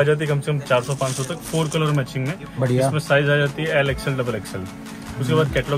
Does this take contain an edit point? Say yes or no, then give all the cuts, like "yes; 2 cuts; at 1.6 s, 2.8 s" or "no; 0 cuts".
no; 0 cuts